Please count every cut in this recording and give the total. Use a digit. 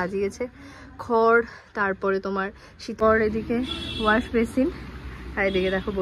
1